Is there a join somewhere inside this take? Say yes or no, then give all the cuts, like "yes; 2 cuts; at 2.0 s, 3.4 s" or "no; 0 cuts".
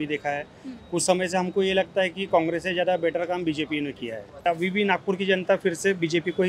yes; 1 cut; at 4.4 s